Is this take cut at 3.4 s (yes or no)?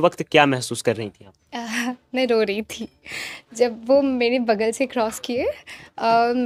no